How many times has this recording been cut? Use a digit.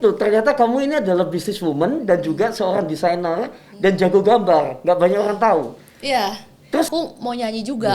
1